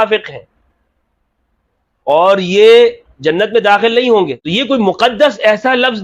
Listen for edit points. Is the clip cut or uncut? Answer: cut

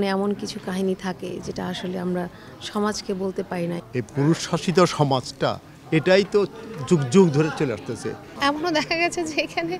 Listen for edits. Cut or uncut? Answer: cut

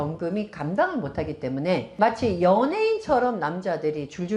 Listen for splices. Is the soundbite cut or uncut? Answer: cut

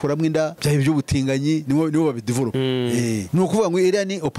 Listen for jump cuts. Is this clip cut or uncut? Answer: uncut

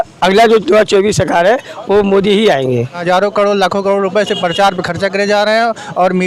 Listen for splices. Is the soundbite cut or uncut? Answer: cut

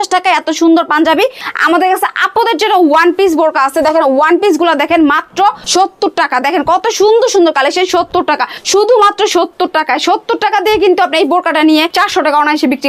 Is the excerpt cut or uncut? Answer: cut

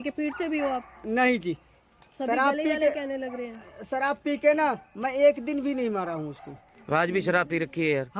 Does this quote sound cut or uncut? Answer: uncut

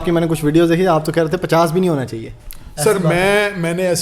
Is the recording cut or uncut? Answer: uncut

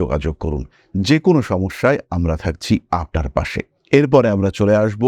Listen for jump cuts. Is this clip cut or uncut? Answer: uncut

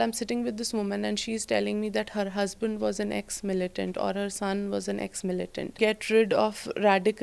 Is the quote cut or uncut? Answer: cut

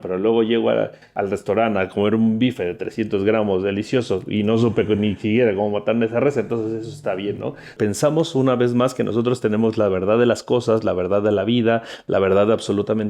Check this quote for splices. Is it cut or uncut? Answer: cut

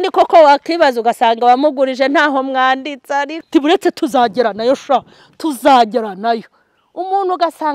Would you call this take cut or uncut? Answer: cut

